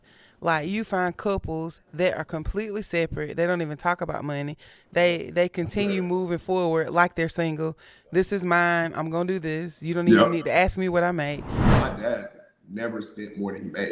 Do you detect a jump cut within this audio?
yes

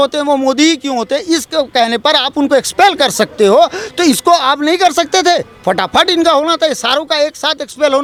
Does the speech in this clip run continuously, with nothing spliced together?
yes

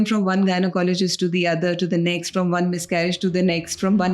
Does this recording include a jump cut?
no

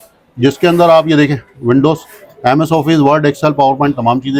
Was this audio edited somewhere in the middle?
no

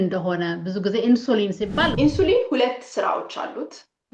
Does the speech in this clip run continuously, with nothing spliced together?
no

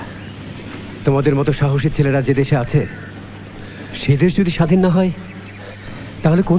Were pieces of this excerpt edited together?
no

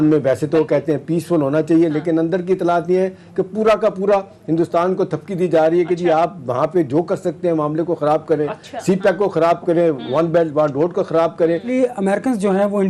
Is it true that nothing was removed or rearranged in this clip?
no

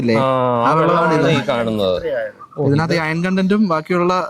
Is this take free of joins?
yes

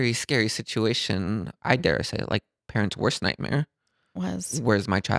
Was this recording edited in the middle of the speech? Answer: yes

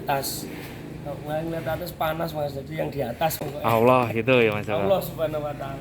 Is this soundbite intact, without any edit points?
yes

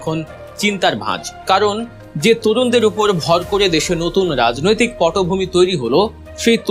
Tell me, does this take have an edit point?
no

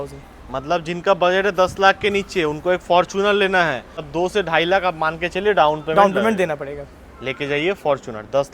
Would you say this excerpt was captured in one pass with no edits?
no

